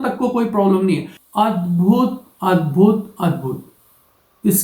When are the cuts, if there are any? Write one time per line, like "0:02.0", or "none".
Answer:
0:01.1